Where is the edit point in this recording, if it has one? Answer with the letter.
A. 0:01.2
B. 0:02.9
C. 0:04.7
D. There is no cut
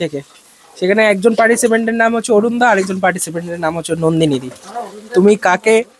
D